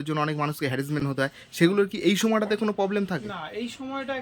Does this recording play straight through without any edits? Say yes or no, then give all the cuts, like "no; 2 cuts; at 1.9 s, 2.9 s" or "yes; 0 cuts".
yes; 0 cuts